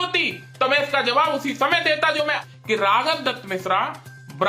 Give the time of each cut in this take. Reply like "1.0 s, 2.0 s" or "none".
2.4 s